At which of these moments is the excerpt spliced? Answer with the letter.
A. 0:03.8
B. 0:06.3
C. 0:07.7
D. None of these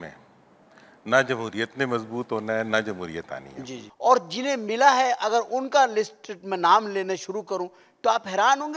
A